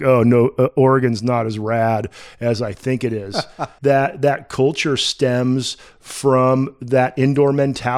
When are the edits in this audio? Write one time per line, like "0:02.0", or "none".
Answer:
0:03.6